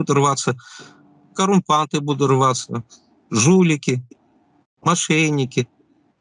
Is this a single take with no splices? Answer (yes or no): yes